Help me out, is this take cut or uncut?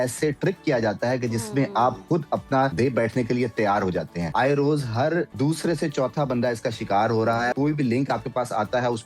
cut